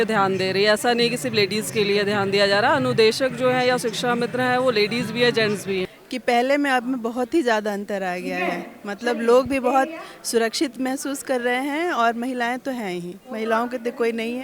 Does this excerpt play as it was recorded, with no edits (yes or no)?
no